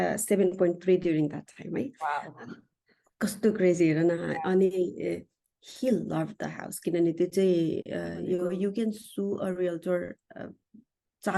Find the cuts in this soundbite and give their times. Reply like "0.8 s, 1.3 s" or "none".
8.4 s